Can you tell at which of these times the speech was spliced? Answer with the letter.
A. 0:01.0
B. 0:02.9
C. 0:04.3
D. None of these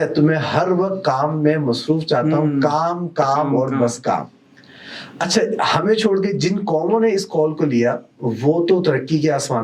D